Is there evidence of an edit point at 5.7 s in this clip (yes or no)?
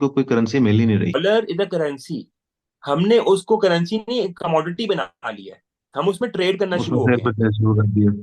no